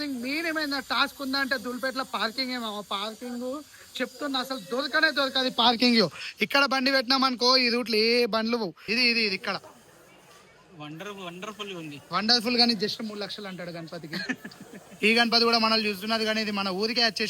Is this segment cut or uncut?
cut